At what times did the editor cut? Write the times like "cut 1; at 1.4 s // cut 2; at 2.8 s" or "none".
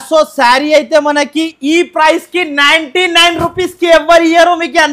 none